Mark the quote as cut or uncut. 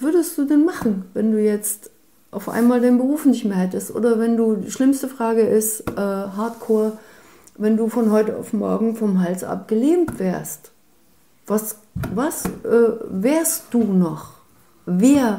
uncut